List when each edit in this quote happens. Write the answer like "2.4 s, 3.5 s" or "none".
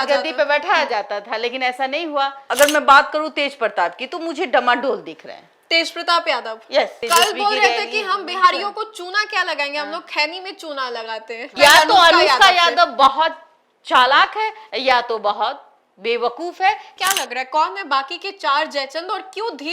2.4 s, 7.0 s, 11.5 s, 16.9 s